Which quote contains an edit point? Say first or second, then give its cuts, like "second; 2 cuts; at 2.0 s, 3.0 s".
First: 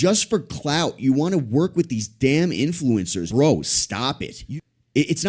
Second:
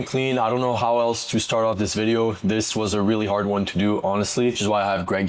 first; 2 cuts; at 3.2 s, 4.4 s